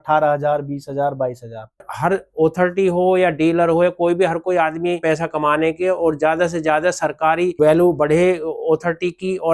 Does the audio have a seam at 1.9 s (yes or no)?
yes